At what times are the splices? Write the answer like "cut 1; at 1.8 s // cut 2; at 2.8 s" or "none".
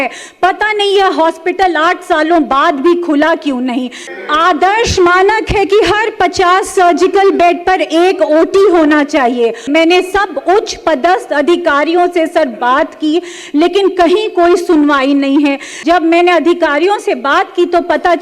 cut 1; at 4.0 s // cut 2; at 9.7 s // cut 3; at 15.7 s